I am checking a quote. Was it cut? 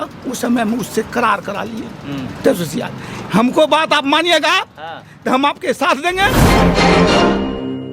yes; 1 cut; at 6.3 s

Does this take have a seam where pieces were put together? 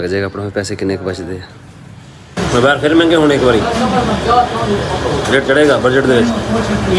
yes; 1 cut; at 2.4 s

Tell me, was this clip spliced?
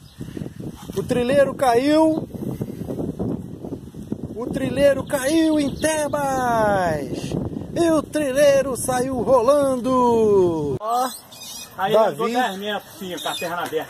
yes; 1 cut; at 10.8 s

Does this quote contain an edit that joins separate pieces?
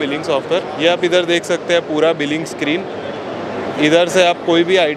no; 0 cuts

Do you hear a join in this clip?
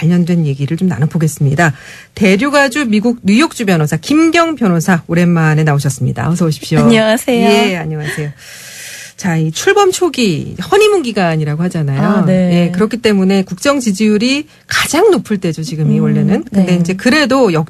no; 0 cuts

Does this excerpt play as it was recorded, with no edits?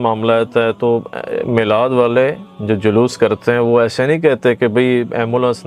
yes; 0 cuts

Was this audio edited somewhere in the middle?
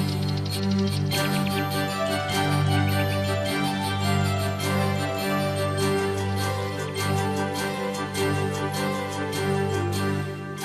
yes; 1 cut; at 6.4 s

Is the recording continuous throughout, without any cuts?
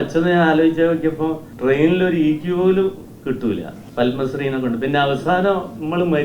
no; 2 cuts; at 1.5 s, 3.8 s

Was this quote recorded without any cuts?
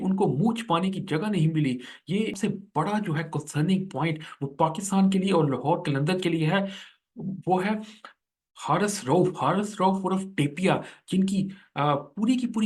no; 1 cut; at 2.4 s

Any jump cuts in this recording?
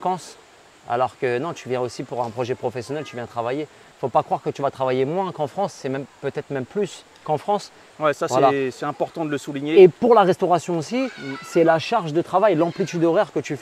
yes; 2 cuts; at 3.9 s, 7.9 s

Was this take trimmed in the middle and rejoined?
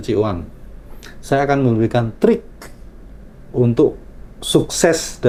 no; 0 cuts

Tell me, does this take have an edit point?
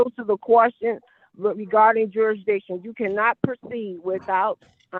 no; 0 cuts

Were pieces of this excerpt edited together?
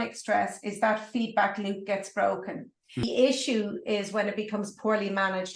yes; 1 cut; at 3.0 s

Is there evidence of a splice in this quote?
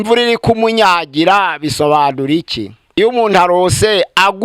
yes; 1 cut; at 3.0 s

